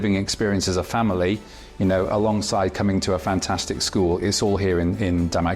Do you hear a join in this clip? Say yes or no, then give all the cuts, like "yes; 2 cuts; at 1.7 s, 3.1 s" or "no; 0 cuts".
no; 0 cuts